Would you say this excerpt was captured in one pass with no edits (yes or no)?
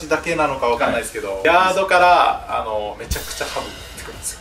no